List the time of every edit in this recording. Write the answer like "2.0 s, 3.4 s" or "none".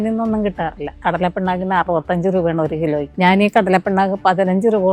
0.9 s, 3.1 s